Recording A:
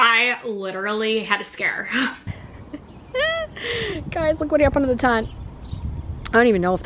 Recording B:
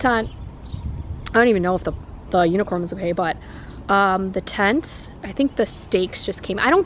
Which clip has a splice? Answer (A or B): A